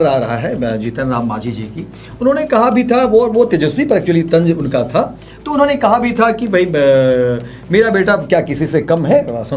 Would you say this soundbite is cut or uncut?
uncut